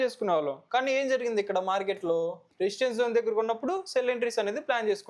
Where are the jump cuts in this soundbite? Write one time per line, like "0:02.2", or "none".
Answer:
0:02.4

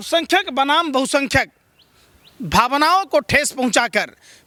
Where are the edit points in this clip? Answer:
none

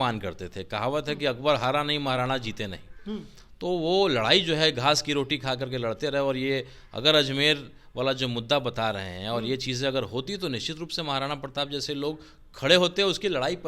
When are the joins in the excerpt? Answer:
none

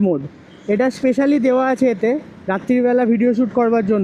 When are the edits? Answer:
none

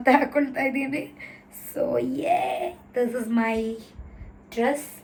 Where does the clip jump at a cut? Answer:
none

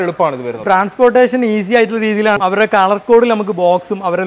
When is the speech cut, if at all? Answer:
0:02.4

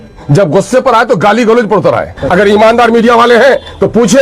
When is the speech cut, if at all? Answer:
0:02.2

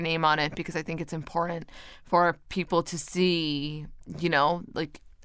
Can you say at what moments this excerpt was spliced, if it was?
none

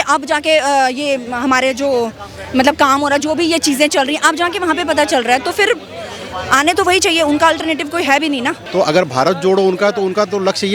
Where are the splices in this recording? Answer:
0:08.6

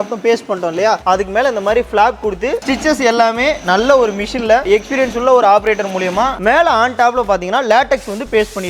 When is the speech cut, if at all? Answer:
0:02.6
0:06.4

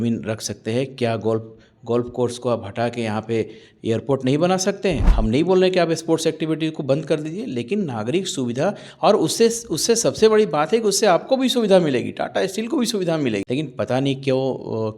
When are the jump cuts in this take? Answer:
0:05.1
0:13.4

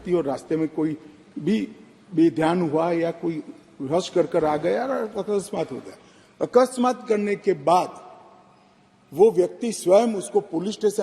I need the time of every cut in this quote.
none

